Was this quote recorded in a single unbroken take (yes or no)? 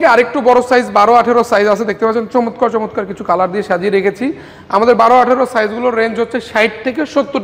yes